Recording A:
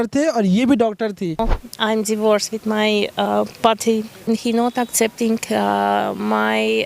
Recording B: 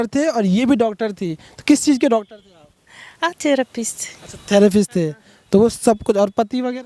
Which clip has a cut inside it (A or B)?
A